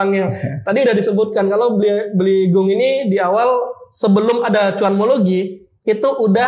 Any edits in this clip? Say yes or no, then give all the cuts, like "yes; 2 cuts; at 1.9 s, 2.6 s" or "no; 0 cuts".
no; 0 cuts